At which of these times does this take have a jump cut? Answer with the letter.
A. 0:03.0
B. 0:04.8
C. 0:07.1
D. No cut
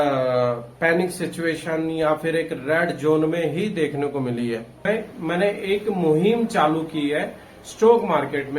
B